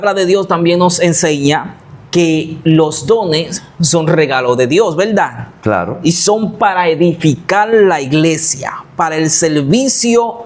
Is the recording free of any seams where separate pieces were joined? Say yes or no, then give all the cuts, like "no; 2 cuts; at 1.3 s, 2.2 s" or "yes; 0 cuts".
yes; 0 cuts